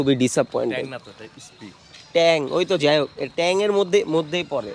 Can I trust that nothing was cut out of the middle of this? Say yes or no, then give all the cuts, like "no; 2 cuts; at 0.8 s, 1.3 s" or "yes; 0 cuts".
yes; 0 cuts